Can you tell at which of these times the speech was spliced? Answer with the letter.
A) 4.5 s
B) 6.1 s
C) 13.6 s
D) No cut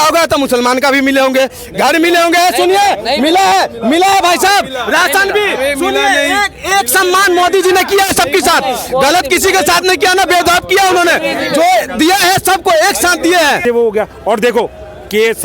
C